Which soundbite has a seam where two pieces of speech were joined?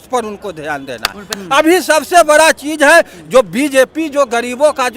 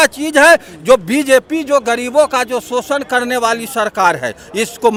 first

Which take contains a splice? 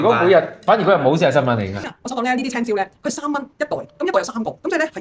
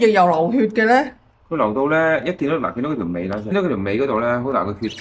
first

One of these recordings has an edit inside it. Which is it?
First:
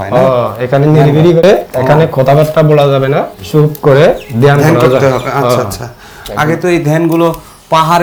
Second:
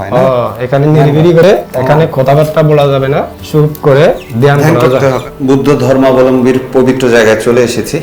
second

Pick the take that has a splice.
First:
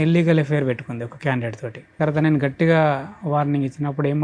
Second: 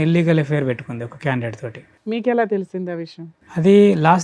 first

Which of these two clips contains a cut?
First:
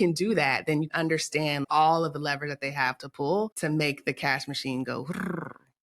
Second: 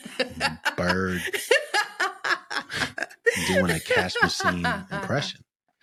first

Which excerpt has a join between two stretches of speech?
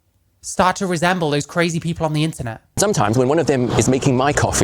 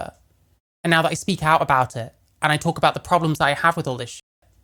first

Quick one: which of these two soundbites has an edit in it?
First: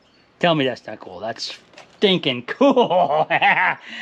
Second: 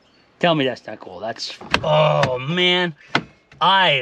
second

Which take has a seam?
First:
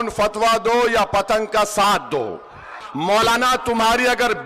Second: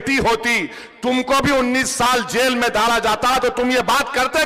first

